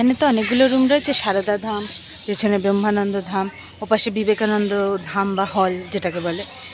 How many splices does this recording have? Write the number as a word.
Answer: zero